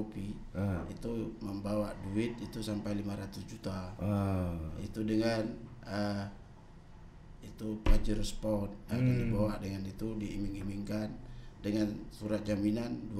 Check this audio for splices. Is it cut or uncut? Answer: uncut